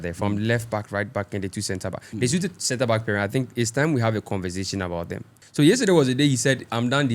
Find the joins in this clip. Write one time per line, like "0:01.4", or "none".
0:05.4

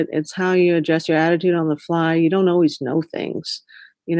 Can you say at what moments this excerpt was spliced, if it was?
none

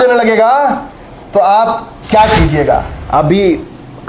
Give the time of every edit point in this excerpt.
0:03.0

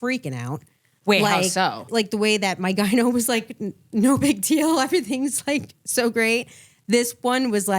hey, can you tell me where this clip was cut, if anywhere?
0:01.9

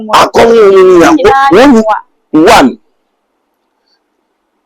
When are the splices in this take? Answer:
none

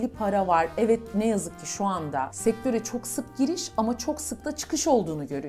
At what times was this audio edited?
none

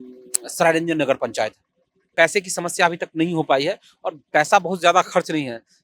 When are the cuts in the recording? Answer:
0:02.1

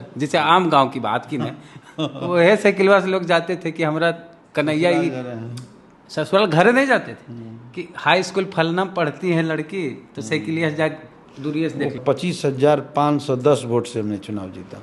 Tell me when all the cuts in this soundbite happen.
0:12.0

